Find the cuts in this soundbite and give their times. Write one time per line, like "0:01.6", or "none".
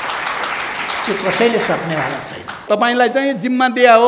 0:02.6

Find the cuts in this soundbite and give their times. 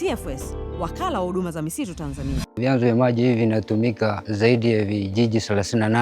0:02.6
0:04.2

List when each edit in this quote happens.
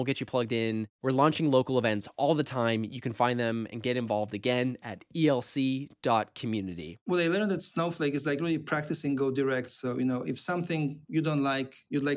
0:07.0

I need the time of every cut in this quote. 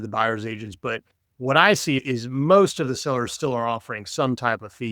none

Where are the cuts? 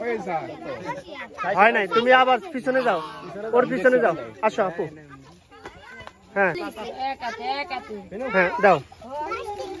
0:06.6

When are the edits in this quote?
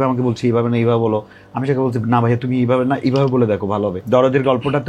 0:04.0

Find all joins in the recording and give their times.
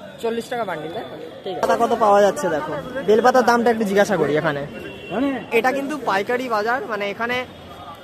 0:01.6
0:05.5

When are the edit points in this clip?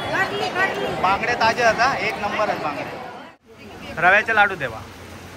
0:03.3

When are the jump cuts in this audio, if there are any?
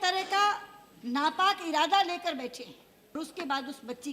0:03.1

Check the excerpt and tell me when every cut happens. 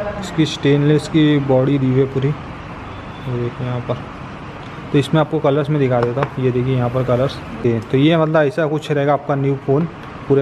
0:07.6

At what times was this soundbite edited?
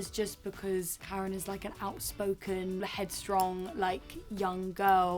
0:01.0
0:02.8

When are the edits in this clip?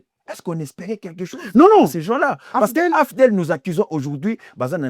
none

